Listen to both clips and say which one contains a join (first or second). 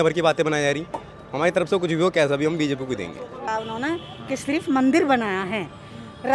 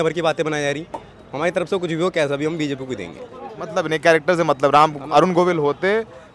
first